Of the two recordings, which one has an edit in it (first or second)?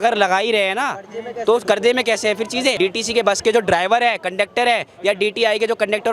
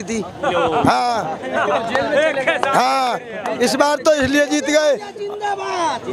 first